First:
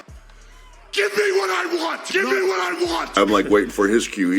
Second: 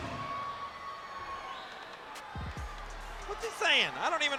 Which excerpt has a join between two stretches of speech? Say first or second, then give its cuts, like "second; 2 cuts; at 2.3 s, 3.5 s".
first; 1 cut; at 3.2 s